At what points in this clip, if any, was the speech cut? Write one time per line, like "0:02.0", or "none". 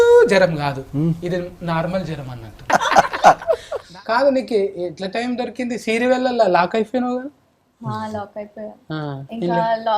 0:02.6
0:03.9